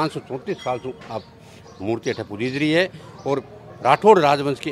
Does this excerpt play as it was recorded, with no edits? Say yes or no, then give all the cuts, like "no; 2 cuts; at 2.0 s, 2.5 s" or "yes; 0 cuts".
yes; 0 cuts